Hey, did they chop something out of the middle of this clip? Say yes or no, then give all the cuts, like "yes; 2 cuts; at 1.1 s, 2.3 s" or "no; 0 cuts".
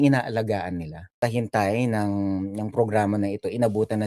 yes; 1 cut; at 1.2 s